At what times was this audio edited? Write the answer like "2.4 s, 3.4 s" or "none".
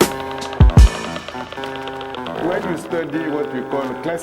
1.0 s